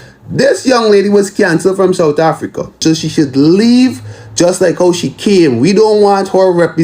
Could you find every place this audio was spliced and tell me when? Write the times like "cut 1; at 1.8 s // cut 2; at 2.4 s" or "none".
cut 1; at 2.7 s